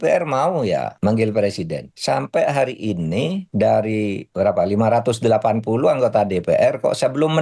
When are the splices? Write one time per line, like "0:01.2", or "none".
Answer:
0:00.9
0:01.9
0:03.4
0:04.2